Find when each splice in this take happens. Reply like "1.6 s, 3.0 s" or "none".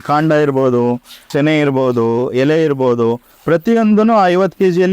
1.3 s